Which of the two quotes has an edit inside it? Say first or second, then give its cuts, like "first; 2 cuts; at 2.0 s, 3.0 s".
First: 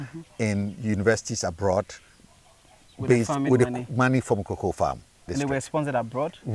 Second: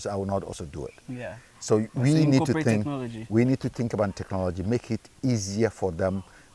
first; 1 cut; at 5.2 s